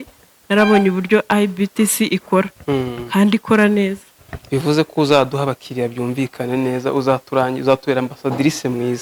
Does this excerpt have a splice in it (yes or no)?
no